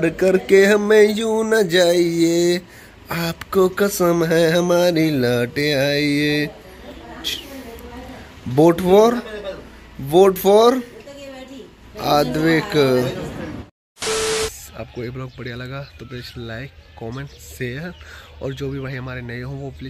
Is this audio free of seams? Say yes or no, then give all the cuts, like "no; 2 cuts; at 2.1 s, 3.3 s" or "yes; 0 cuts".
yes; 0 cuts